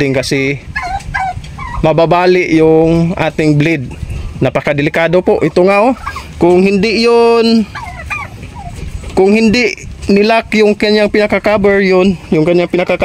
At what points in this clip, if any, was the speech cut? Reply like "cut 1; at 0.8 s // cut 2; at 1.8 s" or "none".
none